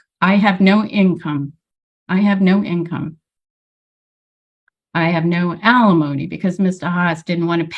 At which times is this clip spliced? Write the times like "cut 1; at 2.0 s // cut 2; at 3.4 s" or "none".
none